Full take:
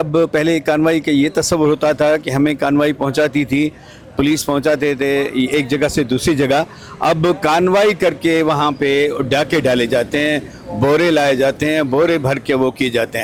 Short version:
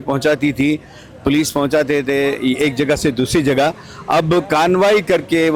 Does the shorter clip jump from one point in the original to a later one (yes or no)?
no